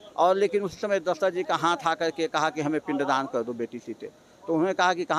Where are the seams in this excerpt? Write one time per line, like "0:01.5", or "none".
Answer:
none